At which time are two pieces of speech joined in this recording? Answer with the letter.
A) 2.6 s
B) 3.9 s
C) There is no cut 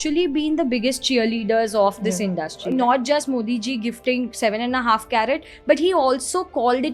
A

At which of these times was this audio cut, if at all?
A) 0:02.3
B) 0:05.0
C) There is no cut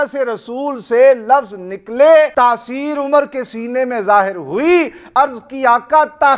A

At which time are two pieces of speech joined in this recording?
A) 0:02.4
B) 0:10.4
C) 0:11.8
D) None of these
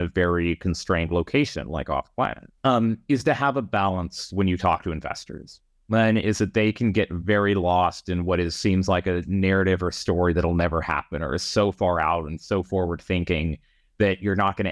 A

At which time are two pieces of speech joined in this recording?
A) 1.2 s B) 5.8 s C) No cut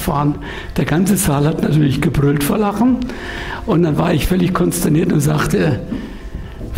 C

